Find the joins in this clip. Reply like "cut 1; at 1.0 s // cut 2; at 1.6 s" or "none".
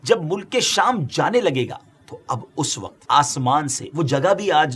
cut 1; at 3.0 s

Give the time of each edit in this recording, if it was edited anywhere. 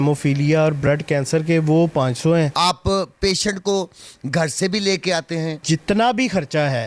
cut 1; at 2.5 s // cut 2; at 5.6 s

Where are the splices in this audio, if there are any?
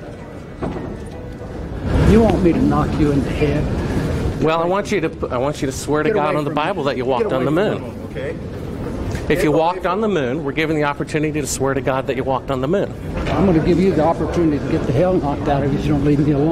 none

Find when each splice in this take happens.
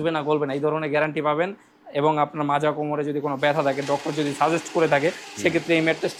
none

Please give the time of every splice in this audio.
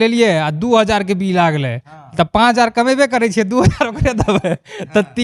none

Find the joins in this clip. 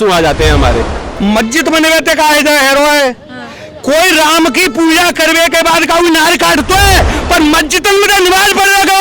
cut 1; at 1.0 s

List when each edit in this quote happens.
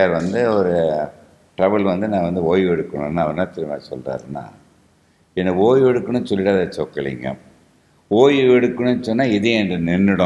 none

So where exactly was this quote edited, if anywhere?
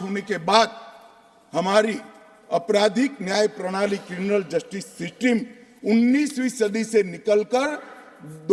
none

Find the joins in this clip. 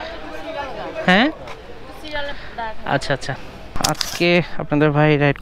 cut 1; at 3.7 s

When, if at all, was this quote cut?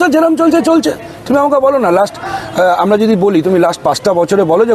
cut 1; at 1.1 s

